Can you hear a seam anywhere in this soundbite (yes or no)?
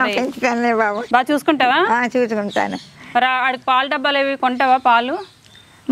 yes